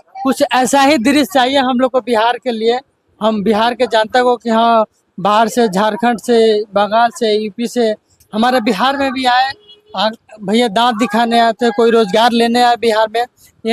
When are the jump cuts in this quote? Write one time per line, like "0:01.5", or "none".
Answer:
none